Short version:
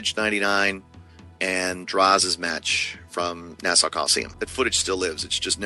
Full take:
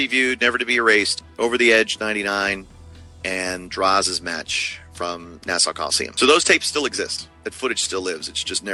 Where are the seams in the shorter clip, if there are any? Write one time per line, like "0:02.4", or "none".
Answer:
0:04.2